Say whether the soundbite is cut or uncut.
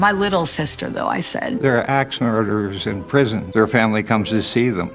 cut